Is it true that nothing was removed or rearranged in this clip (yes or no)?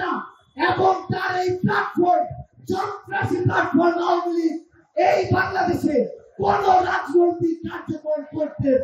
yes